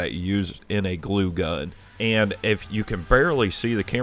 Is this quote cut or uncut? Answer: cut